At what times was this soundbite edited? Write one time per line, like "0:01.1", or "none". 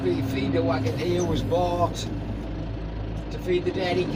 none